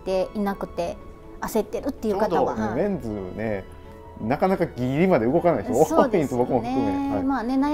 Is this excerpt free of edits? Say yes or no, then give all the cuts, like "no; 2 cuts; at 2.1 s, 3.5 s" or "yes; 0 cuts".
yes; 0 cuts